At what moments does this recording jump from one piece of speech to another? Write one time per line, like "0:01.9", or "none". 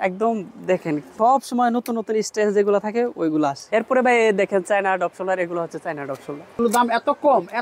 0:01.1
0:03.6
0:06.6